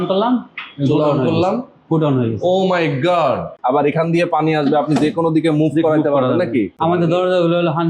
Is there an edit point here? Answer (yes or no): yes